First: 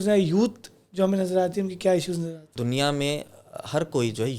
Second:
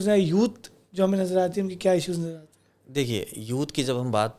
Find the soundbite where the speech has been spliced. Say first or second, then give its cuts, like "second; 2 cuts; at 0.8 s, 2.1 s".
first; 1 cut; at 2.5 s